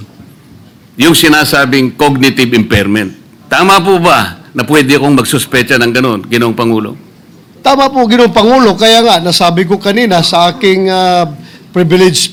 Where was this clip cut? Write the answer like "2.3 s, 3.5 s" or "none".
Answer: none